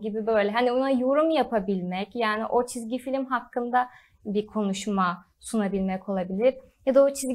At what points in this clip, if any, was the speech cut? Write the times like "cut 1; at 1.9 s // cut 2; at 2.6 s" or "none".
none